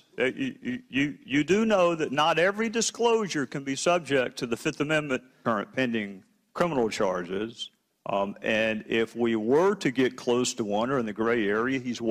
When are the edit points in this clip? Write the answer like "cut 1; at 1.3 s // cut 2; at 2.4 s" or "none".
none